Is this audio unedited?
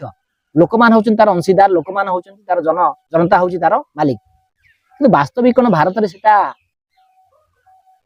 yes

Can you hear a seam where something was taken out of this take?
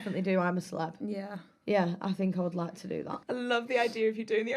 no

